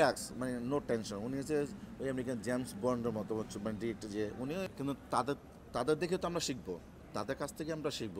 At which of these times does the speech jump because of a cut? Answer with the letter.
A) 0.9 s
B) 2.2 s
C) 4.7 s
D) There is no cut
C